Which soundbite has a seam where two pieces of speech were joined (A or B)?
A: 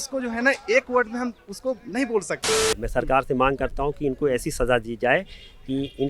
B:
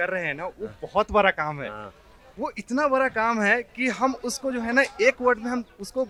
A